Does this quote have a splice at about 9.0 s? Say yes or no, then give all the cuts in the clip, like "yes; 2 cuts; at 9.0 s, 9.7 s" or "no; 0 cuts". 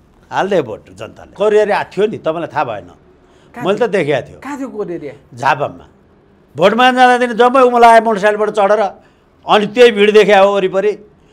no; 1 cut; at 1.3 s